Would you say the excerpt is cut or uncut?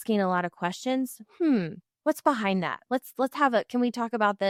uncut